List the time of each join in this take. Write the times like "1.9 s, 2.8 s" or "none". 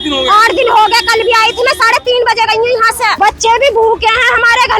3.1 s